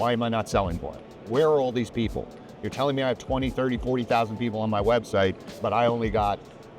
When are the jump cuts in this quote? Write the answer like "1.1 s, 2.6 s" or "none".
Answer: 5.5 s

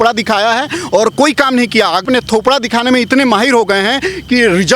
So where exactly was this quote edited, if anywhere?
2.0 s

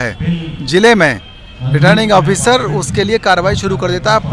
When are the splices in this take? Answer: none

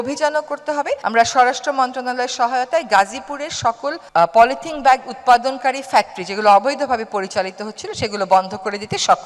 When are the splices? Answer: none

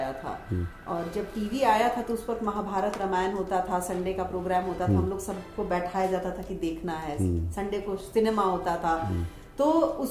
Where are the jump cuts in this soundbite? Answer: none

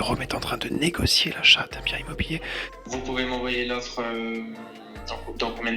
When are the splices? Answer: 2.7 s

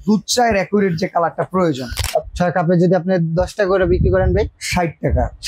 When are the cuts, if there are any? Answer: 2.0 s

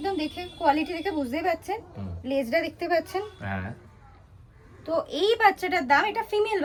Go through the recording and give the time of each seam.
none

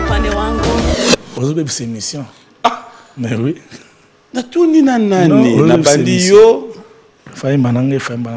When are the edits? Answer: 0.9 s

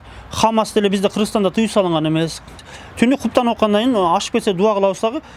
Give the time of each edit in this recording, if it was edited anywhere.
2.7 s

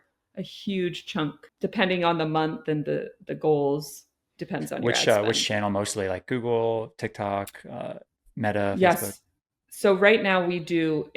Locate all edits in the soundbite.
1.4 s

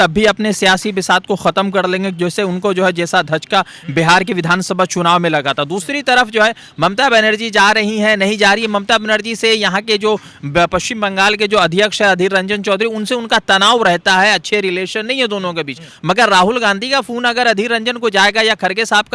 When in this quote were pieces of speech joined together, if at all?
none

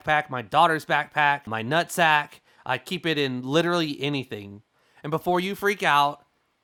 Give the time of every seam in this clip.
none

